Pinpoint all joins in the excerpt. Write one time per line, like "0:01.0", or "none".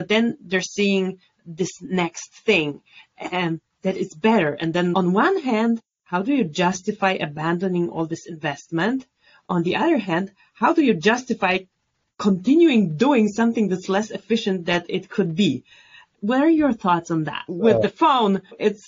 0:17.5